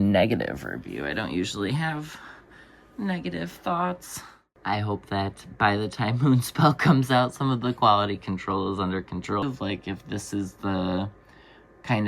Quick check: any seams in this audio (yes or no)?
yes